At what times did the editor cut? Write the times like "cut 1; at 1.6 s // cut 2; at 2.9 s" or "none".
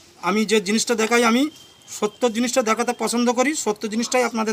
none